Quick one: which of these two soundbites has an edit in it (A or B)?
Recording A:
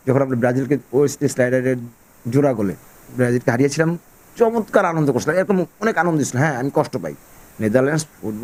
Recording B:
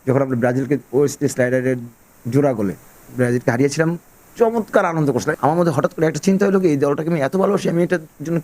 B